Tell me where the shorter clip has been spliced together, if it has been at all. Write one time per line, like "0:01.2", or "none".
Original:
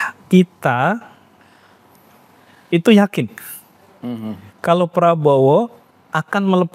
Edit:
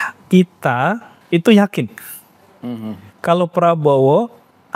0:01.1